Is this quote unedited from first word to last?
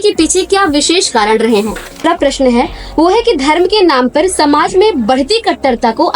no; 1 cut; at 2.0 s

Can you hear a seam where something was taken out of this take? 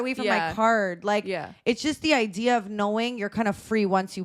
no; 0 cuts

